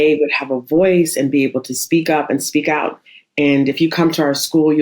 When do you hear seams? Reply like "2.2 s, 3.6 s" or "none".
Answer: 3.0 s